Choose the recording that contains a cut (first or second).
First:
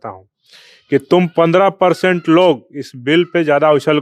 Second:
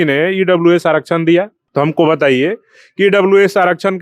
second